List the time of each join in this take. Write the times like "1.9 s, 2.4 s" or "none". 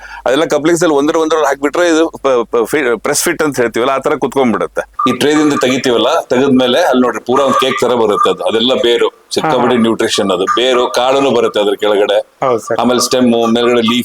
4.9 s